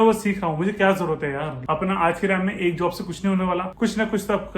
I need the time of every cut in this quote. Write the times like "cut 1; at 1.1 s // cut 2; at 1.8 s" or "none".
cut 1; at 1.6 s // cut 2; at 3.7 s